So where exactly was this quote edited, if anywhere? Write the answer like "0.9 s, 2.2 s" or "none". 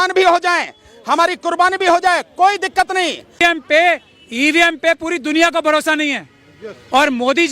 3.4 s